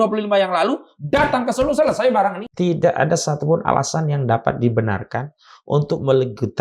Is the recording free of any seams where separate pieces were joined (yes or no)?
no